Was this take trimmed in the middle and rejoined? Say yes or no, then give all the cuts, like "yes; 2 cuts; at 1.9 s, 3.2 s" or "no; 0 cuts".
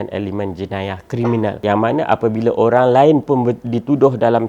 yes; 1 cut; at 1.6 s